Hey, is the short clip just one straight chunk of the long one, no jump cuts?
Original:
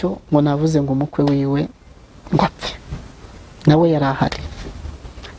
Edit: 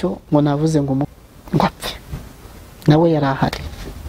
no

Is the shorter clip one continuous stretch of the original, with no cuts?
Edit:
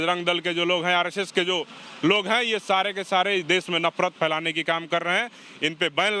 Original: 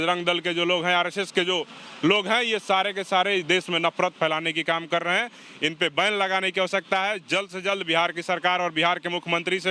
yes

